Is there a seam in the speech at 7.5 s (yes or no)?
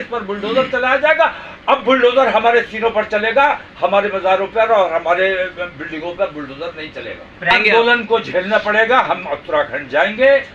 yes